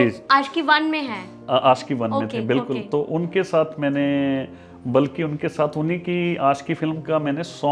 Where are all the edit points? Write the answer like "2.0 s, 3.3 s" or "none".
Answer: none